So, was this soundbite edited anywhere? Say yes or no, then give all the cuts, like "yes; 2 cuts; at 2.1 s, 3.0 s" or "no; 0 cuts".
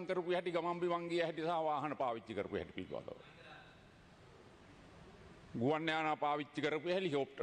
no; 0 cuts